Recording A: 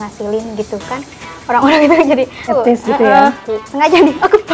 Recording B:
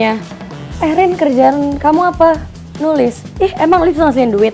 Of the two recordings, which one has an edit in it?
A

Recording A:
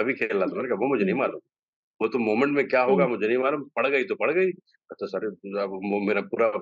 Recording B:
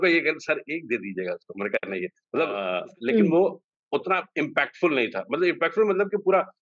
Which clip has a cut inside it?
B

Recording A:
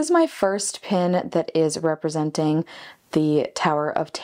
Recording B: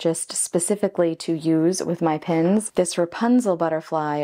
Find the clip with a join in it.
B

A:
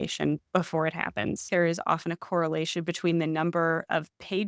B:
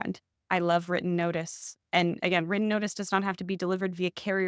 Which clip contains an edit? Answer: A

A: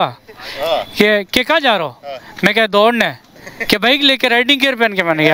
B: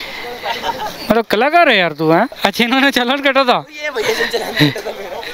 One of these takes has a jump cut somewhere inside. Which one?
B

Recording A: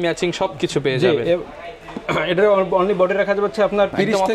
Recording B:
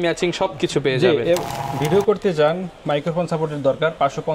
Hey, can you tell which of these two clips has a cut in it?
B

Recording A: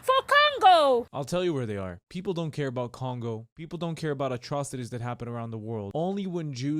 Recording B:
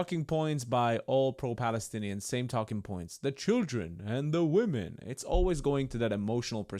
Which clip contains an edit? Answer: A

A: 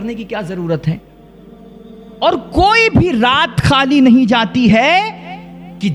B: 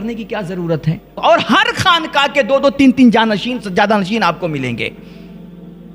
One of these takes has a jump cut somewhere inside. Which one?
B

